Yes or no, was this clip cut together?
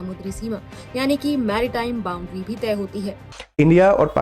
yes